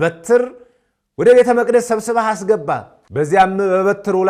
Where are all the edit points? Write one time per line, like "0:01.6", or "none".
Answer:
0:03.0